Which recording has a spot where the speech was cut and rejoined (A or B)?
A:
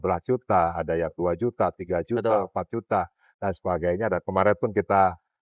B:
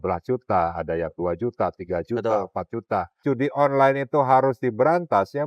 B